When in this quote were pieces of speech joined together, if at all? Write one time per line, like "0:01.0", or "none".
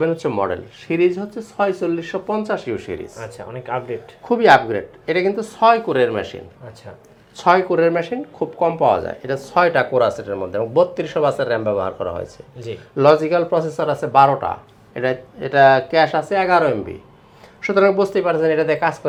none